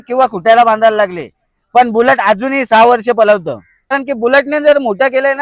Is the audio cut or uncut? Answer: cut